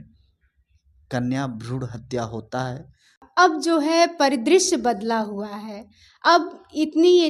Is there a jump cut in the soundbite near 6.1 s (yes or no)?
no